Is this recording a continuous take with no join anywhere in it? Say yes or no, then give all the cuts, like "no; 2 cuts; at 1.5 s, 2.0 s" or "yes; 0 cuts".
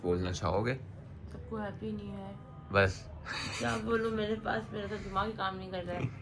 yes; 0 cuts